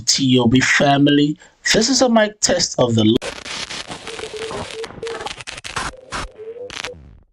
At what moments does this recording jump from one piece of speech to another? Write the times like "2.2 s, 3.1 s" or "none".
3.2 s